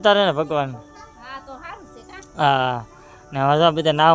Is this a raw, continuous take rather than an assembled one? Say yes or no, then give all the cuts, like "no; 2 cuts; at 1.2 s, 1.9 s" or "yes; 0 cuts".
yes; 0 cuts